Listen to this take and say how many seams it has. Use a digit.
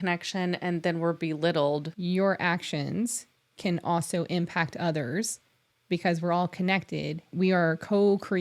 2